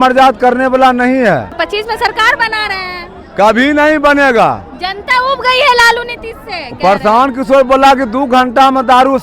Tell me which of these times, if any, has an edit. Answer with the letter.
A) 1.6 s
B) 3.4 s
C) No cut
A